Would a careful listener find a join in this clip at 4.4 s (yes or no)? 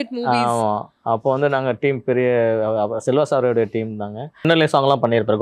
yes